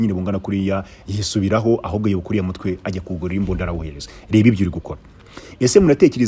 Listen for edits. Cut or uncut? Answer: uncut